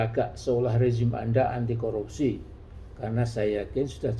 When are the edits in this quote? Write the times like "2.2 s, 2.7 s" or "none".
none

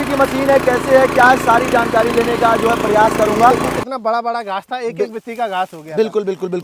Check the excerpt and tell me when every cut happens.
3.7 s

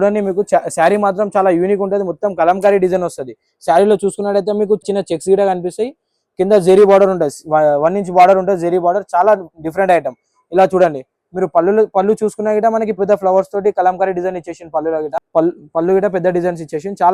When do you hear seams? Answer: none

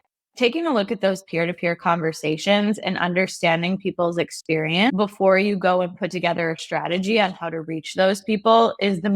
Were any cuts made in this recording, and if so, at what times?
4.9 s

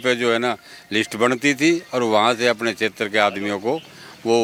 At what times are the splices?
none

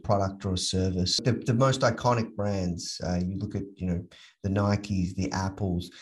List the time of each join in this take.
1.2 s

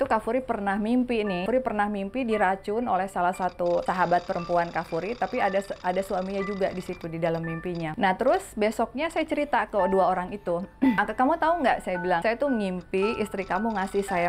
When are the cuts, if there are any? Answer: 1.4 s, 3.8 s, 7.9 s, 11.0 s, 12.2 s

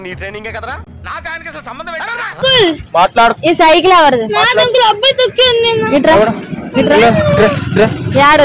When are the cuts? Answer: none

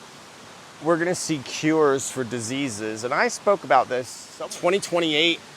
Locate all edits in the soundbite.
4.2 s

